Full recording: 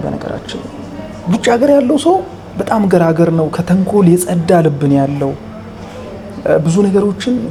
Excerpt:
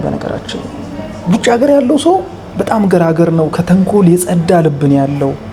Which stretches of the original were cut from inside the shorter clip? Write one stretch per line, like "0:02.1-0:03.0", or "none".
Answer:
none